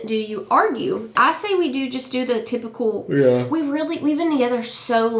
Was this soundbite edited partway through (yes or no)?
no